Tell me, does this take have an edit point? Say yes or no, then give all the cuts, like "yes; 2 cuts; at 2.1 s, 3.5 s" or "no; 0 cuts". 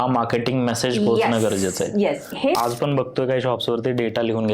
yes; 1 cut; at 2.6 s